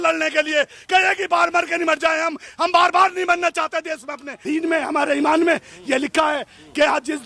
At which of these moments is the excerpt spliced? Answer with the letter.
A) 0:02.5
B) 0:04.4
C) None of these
B